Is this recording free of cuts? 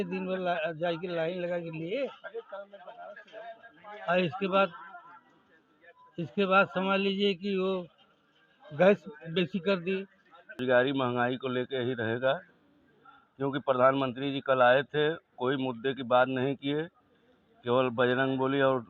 no; 1 cut; at 10.6 s

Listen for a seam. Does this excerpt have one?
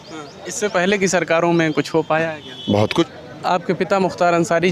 yes; 1 cut; at 3.1 s

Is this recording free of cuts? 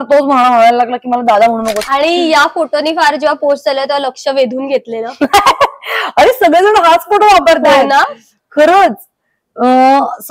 no; 1 cut; at 1.9 s

